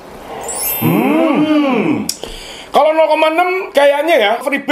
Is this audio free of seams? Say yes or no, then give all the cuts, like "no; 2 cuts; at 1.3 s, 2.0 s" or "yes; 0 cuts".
yes; 0 cuts